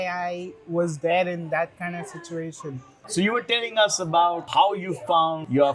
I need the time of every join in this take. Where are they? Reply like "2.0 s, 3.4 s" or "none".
3.0 s